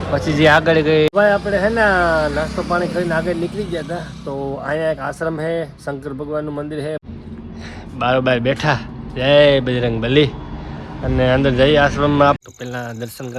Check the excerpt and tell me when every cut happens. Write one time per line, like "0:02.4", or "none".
0:01.1
0:07.0
0:12.4